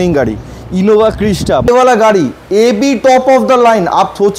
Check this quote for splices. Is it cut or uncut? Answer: cut